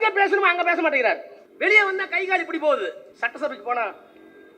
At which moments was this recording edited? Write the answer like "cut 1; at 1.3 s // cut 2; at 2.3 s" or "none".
cut 1; at 1.4 s // cut 2; at 3.1 s